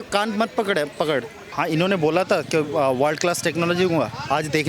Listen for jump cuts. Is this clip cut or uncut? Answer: cut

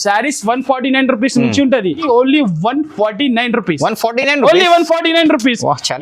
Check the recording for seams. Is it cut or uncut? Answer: cut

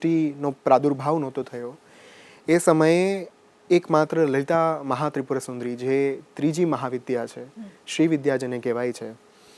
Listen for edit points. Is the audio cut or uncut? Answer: uncut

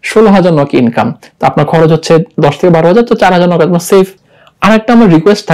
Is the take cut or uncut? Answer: cut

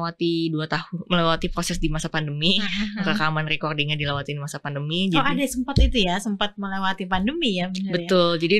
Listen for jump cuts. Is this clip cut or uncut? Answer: uncut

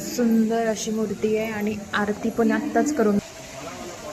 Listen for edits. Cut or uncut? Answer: cut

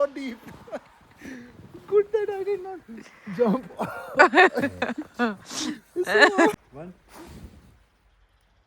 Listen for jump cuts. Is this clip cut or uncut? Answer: cut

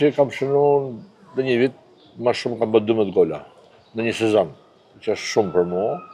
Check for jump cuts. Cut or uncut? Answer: uncut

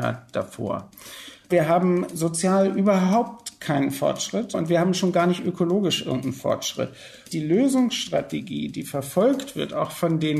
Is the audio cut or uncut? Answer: cut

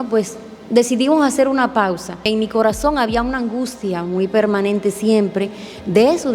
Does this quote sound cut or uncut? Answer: cut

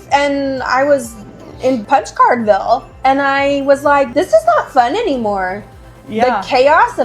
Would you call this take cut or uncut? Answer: cut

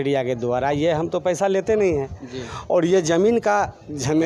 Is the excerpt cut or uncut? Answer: uncut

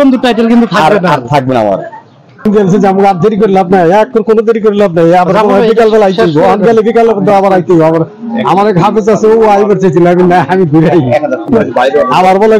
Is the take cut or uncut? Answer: cut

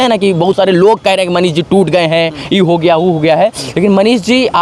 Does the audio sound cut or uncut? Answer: uncut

